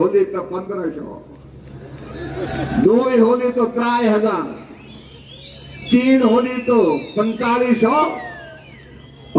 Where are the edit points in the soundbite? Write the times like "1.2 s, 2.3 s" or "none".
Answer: none